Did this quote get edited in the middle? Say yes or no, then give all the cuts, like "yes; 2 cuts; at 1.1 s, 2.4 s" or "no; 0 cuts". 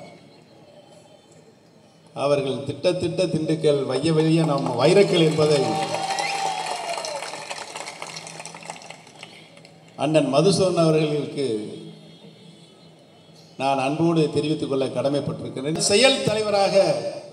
yes; 1 cut; at 15.7 s